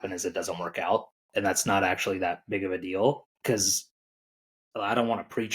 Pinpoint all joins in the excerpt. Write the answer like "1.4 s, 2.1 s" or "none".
1.2 s, 3.3 s